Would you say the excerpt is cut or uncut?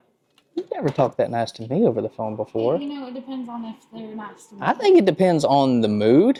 uncut